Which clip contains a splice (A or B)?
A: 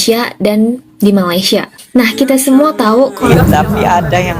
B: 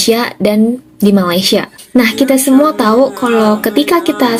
A